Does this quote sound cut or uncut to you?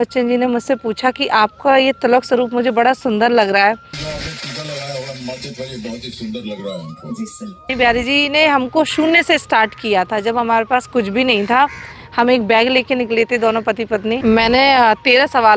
cut